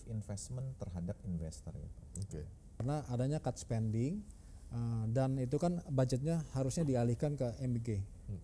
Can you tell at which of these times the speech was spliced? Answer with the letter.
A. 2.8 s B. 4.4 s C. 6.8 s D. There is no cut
A